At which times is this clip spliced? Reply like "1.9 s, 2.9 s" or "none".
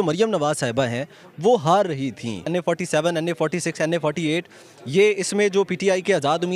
2.5 s